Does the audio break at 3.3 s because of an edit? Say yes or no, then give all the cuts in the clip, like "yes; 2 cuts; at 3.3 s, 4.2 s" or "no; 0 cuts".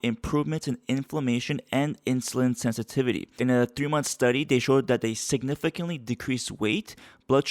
yes; 1 cut; at 3.3 s